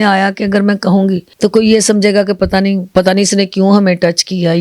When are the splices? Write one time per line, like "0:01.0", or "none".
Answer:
0:01.3
0:02.8